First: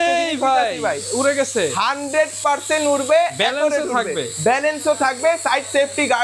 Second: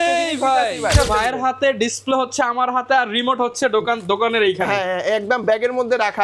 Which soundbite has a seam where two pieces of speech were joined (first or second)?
second